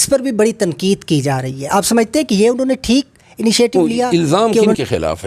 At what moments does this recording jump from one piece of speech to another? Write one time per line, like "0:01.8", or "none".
0:03.8